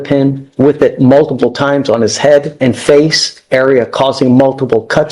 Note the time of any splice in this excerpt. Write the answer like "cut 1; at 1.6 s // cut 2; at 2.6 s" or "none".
cut 1; at 2.5 s